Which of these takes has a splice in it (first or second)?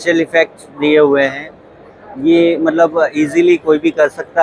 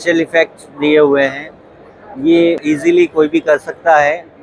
second